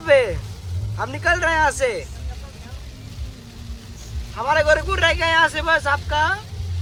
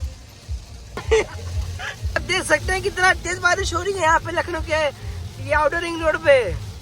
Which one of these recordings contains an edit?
second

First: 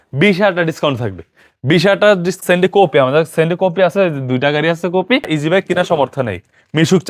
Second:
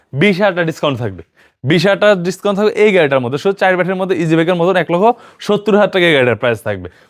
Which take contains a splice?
first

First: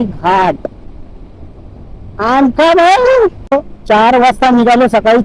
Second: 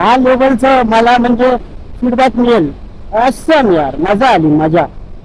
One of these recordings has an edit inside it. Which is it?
first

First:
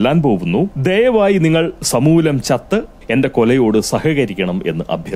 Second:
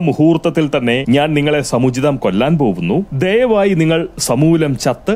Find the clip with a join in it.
second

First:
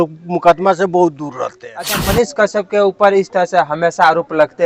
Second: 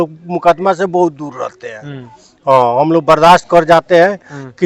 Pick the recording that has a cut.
first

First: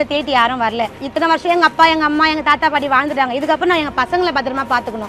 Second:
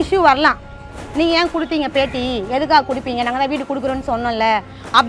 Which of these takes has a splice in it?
first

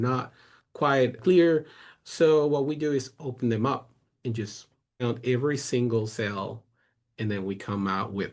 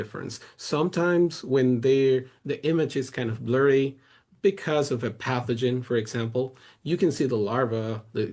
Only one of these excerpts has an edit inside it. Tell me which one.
first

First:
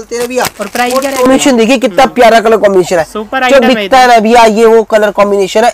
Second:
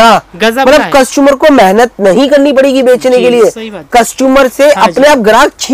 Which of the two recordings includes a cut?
first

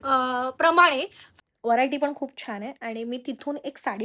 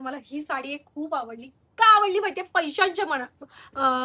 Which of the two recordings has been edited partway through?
first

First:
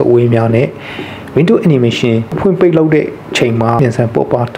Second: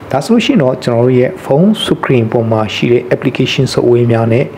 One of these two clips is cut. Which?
first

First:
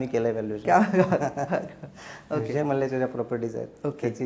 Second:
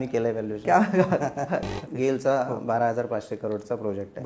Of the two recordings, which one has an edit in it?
second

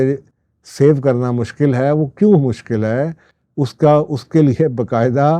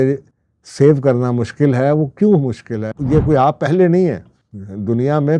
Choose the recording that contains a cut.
second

